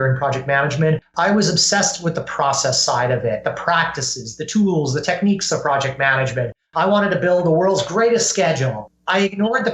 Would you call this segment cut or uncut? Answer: cut